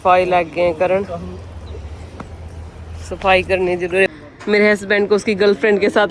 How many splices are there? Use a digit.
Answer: 1